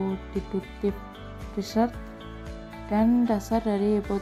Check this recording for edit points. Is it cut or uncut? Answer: uncut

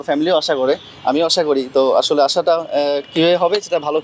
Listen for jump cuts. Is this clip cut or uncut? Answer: uncut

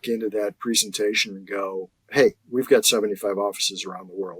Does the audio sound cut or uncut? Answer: cut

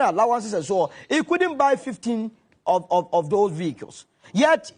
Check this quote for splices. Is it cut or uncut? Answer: uncut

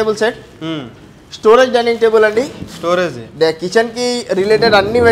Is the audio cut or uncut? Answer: uncut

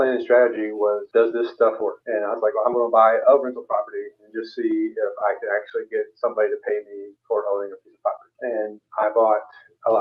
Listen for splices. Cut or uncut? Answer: cut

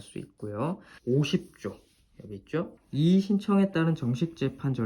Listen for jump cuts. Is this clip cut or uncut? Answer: cut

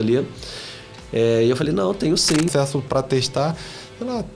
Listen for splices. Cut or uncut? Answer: cut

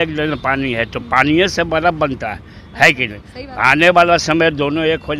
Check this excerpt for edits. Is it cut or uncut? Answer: uncut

